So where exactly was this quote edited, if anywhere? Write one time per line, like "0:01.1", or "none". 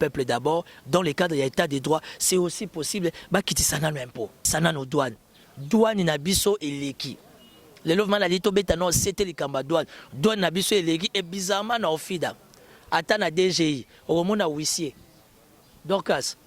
0:04.4